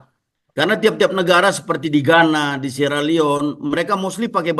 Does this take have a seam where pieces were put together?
no; 0 cuts

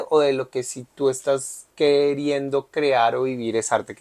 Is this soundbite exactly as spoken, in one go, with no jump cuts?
no; 1 cut; at 1.6 s

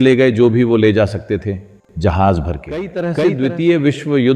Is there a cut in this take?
yes; 1 cut; at 3.1 s

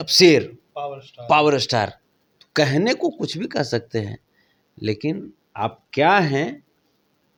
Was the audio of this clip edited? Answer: no; 0 cuts

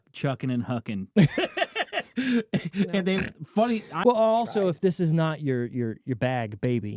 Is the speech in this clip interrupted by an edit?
yes; 1 cut; at 3.9 s

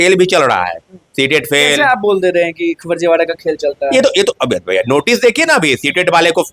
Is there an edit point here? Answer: no; 0 cuts

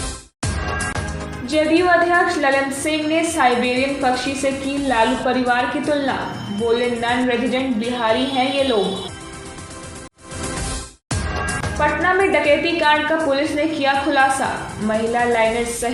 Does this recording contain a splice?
no; 0 cuts

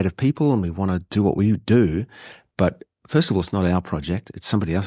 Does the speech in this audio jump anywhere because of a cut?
no; 0 cuts

